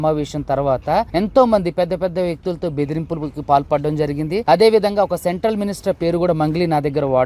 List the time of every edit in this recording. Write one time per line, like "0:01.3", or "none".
0:01.1
0:04.4